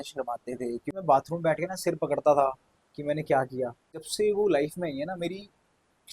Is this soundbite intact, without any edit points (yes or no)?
no